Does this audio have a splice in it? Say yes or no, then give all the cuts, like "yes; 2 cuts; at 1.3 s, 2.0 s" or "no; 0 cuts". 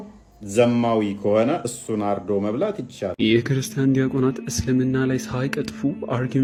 no; 0 cuts